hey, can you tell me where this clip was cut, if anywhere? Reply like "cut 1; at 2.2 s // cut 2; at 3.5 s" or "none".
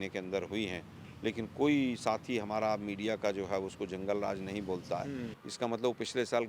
cut 1; at 5.4 s